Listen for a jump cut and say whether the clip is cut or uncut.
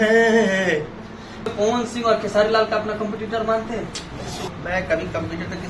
cut